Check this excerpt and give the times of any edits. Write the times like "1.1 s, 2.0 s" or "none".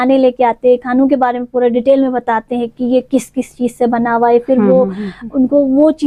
none